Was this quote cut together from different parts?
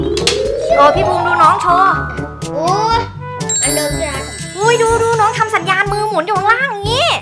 no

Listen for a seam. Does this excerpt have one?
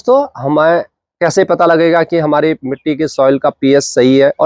no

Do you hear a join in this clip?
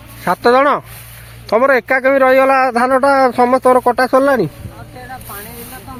no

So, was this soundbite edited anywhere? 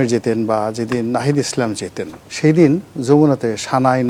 no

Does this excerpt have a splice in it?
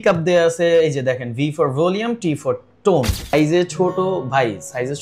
yes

